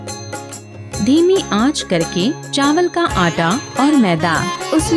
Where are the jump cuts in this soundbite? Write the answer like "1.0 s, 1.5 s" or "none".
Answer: none

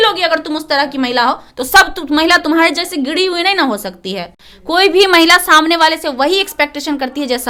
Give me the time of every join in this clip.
none

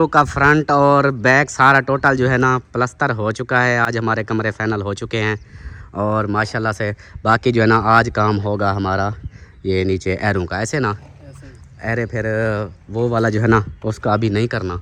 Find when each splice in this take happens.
none

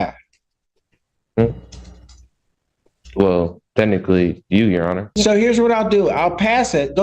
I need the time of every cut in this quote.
5.1 s

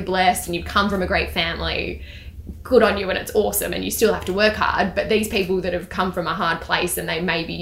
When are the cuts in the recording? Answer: none

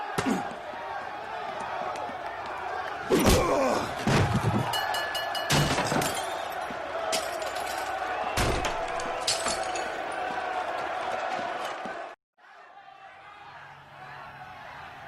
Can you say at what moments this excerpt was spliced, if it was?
12.4 s

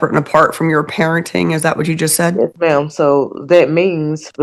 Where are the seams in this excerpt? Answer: none

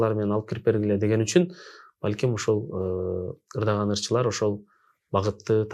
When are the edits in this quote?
none

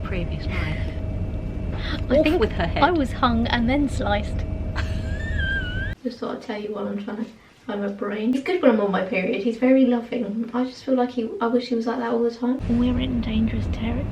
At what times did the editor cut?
5.9 s, 8.3 s, 12.6 s

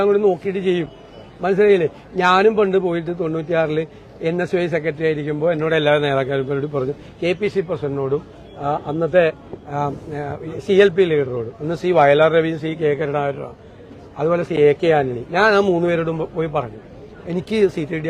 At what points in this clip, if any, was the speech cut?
none

